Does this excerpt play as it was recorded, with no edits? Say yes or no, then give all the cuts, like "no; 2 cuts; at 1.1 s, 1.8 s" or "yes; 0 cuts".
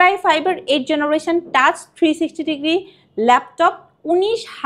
yes; 0 cuts